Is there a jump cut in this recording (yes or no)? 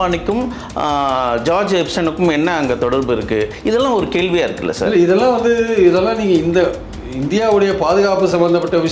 no